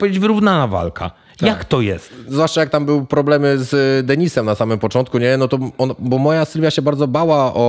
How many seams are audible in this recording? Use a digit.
1